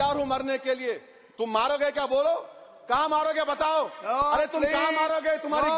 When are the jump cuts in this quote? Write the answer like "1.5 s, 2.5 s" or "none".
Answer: none